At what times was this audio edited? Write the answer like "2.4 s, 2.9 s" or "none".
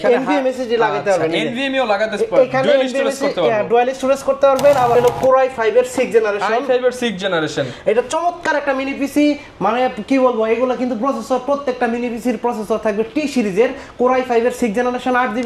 5.0 s